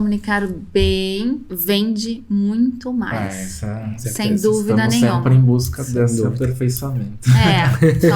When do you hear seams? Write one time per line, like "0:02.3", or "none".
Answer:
0:01.5